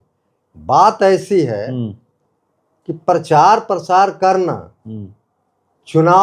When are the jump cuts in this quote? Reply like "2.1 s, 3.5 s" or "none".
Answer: none